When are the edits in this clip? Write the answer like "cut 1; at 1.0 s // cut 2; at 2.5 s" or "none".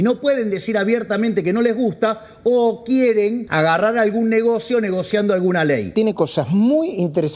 cut 1; at 3.4 s // cut 2; at 5.9 s